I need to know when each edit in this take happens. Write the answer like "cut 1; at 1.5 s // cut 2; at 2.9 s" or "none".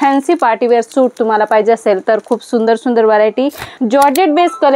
cut 1; at 3.7 s